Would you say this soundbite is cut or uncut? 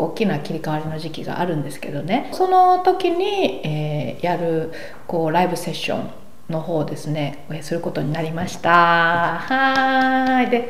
cut